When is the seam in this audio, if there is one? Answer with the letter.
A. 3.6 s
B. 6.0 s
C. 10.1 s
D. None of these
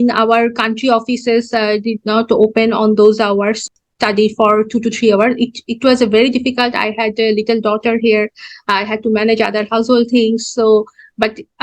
A